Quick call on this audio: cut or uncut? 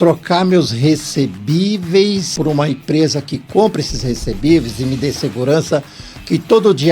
cut